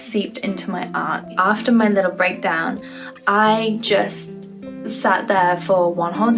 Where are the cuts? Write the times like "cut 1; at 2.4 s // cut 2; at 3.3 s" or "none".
cut 1; at 1.3 s